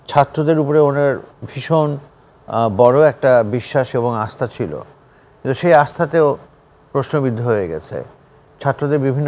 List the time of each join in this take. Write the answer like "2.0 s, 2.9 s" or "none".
none